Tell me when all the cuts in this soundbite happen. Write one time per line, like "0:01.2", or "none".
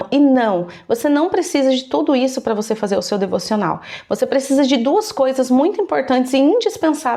none

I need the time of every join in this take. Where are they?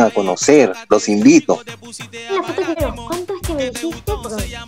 0:02.8

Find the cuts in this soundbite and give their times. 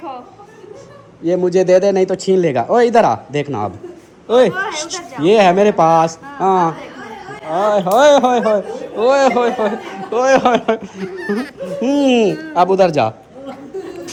none

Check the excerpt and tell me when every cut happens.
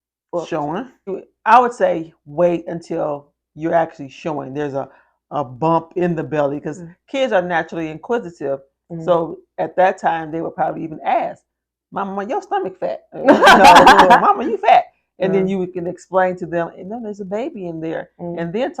0:01.1

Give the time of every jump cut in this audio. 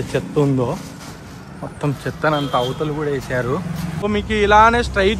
0:04.0

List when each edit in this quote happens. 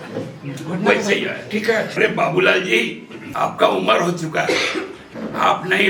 0:01.9

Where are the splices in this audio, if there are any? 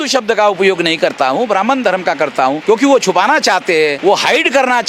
0:02.6
0:04.0

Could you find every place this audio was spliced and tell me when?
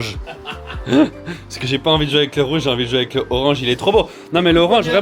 none

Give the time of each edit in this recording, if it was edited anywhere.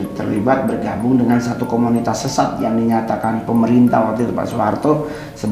none

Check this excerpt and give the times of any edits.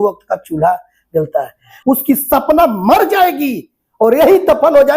0:01.7

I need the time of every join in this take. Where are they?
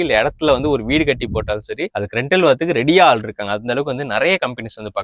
none

